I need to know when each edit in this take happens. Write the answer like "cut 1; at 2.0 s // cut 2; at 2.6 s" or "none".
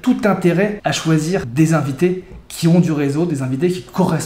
cut 1; at 1.2 s